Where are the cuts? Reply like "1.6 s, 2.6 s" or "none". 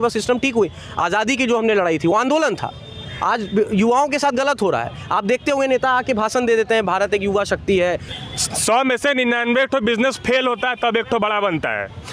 8.1 s